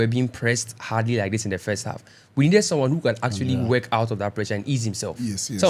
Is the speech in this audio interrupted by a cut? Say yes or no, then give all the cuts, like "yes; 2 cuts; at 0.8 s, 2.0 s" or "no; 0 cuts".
no; 0 cuts